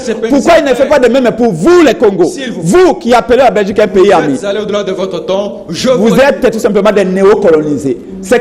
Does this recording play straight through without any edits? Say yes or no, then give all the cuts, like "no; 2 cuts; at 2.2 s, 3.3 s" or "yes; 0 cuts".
yes; 0 cuts